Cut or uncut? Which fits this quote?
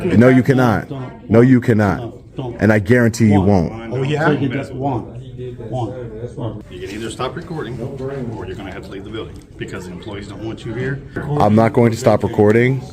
cut